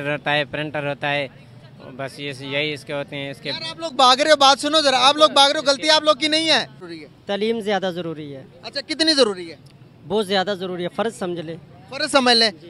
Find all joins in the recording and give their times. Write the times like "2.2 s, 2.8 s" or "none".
6.9 s